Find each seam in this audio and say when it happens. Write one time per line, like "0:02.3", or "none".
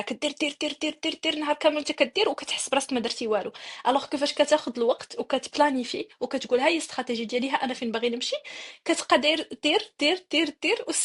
none